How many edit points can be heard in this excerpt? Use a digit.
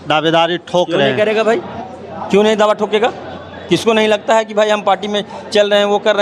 0